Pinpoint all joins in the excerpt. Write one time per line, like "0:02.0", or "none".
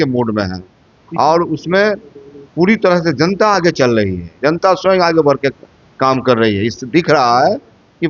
none